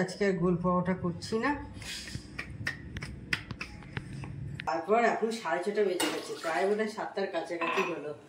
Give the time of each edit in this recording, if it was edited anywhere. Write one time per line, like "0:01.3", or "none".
0:04.7